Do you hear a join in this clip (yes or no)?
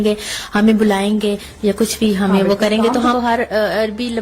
yes